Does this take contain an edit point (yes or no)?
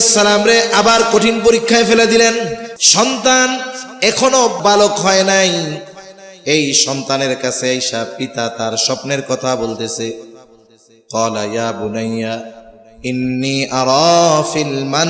yes